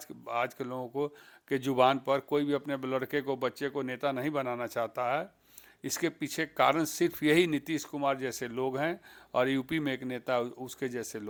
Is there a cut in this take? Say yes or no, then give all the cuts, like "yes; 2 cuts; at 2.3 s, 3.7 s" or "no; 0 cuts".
no; 0 cuts